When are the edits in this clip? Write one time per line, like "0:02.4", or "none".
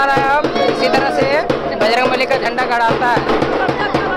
none